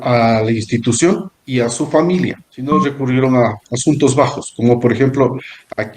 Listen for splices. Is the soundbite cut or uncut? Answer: cut